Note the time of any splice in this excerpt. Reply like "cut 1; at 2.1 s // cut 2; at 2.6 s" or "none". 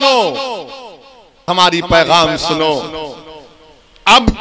cut 1; at 1.5 s